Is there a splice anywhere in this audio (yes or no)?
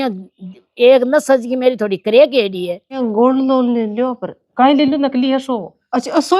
yes